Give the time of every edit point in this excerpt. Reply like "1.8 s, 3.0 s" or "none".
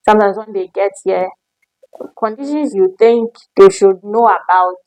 none